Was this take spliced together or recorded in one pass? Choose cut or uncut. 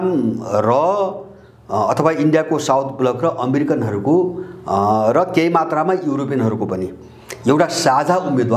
uncut